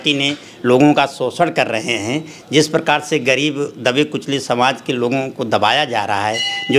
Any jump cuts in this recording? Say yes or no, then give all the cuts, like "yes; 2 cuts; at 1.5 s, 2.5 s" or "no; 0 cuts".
no; 0 cuts